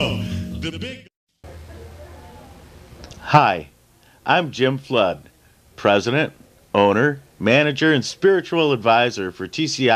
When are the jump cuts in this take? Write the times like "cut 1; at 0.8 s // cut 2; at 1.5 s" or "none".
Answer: none